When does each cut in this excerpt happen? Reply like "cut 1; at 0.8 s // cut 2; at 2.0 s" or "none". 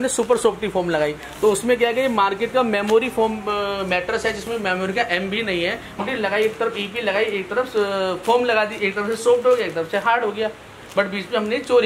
cut 1; at 6.0 s